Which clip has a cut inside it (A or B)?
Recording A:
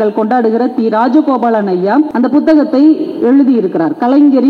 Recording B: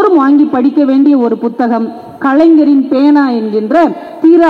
A